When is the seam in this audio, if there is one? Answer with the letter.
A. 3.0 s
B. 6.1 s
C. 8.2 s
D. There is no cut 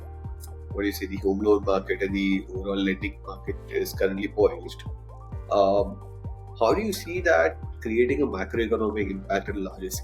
B